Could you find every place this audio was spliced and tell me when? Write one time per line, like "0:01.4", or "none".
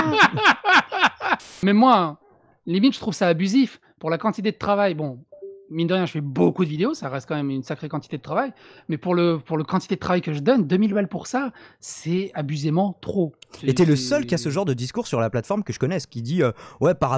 0:01.4